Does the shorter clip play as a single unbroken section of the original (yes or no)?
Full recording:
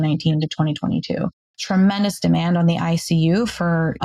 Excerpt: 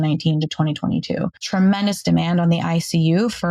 no